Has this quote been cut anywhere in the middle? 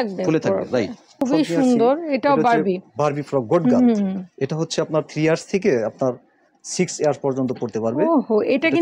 yes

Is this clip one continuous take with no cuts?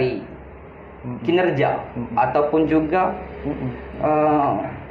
yes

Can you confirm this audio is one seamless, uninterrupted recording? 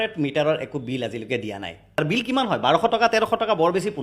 no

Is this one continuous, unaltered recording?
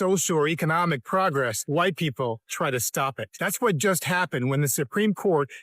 no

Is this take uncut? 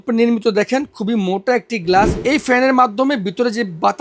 no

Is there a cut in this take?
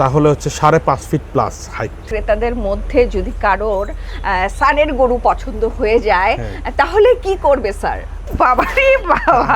yes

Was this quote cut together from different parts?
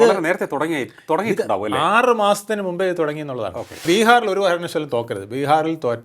yes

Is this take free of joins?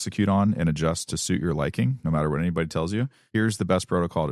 no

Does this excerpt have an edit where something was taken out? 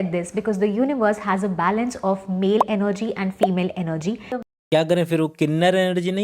yes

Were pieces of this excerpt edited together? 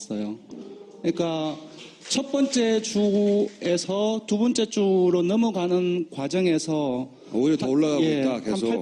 no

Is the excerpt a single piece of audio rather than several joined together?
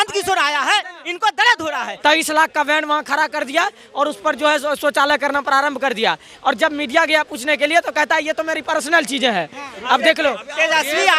no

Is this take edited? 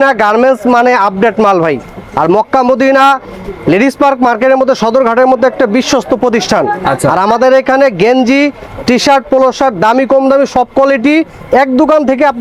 no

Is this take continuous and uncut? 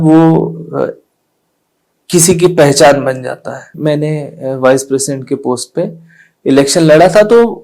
no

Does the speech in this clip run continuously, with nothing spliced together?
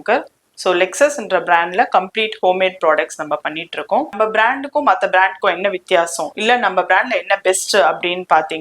no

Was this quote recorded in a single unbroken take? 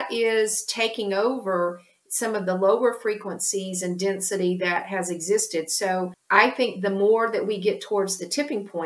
no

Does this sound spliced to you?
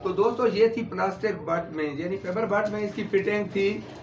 no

